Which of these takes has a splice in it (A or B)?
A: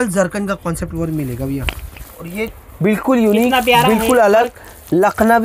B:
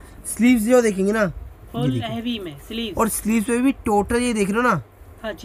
A